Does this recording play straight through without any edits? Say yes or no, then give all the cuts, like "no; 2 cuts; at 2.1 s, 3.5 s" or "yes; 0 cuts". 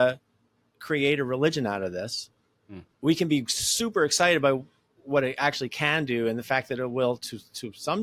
yes; 0 cuts